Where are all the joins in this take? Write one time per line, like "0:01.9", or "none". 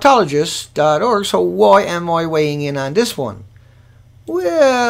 0:02.3